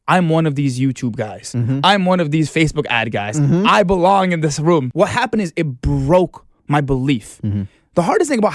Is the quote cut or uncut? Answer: cut